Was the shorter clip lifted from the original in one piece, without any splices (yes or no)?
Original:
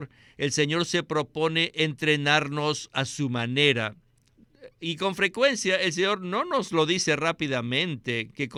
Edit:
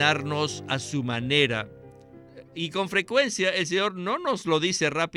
yes